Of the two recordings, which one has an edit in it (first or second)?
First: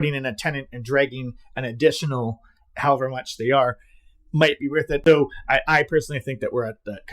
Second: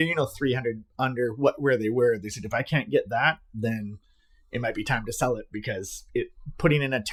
first